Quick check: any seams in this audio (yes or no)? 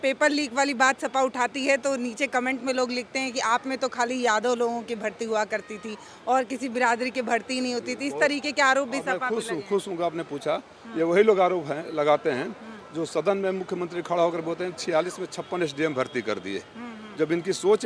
no